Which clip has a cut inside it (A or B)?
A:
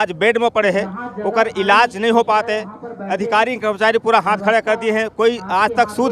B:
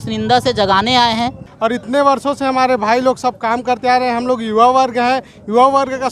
B